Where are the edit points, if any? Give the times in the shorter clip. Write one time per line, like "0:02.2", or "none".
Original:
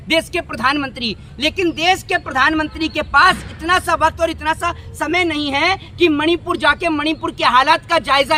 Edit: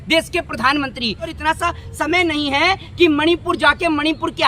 0:01.4